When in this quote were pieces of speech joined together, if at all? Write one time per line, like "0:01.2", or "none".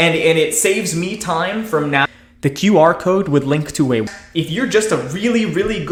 none